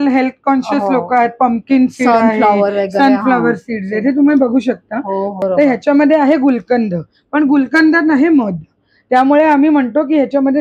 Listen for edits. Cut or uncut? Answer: cut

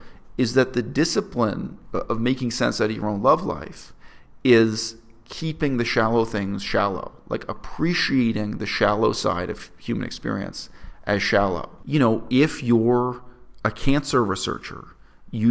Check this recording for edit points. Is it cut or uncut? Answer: cut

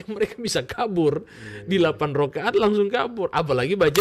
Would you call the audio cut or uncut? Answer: uncut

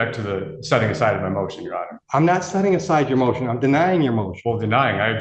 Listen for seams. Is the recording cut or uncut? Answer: cut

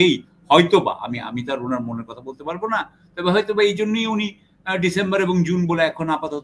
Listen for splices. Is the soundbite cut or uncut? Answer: uncut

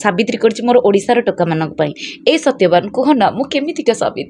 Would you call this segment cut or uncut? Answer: uncut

